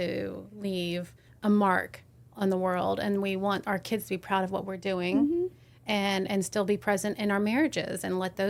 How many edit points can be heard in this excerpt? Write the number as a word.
one